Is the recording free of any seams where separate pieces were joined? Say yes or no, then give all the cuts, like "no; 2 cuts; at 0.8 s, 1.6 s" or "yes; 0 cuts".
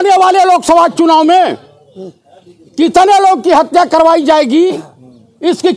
yes; 0 cuts